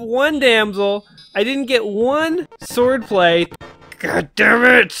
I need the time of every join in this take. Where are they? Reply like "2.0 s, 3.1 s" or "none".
2.6 s, 3.5 s